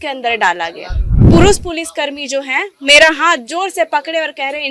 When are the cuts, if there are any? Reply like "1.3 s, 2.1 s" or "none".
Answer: 1.3 s